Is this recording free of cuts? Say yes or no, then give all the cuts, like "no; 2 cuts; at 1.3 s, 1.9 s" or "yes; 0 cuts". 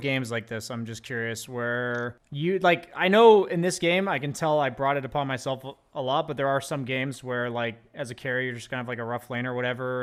yes; 0 cuts